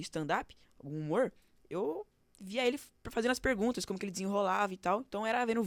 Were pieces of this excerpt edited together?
no; 0 cuts

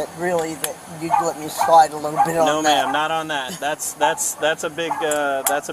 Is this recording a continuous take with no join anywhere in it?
yes; 0 cuts

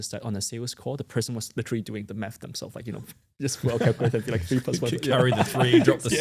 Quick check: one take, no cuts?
yes; 0 cuts

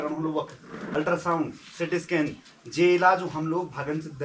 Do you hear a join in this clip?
yes; 1 cut; at 0.9 s

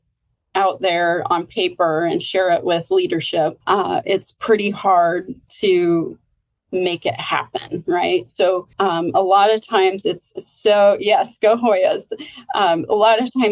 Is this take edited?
no; 0 cuts

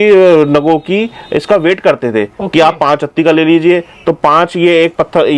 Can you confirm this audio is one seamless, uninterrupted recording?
yes; 0 cuts

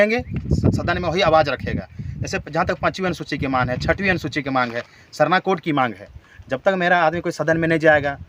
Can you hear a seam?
no; 0 cuts

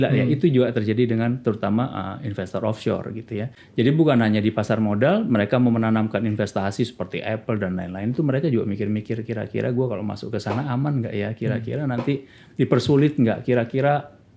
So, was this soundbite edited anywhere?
yes; 1 cut; at 3.6 s

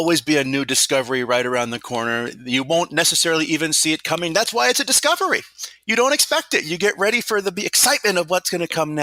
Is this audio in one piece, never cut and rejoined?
yes; 0 cuts

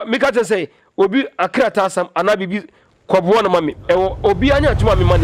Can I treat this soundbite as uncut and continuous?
yes; 0 cuts

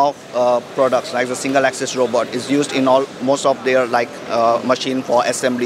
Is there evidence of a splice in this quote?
no; 0 cuts

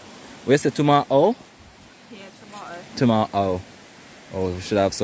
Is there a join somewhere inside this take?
no; 0 cuts

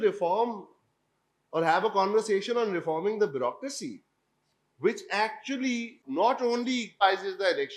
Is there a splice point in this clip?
yes; 2 cuts; at 6.0 s, 7.0 s

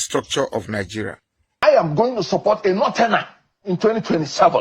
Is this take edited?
yes; 1 cut; at 1.6 s

